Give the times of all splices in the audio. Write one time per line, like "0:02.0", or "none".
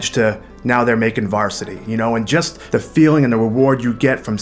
0:02.6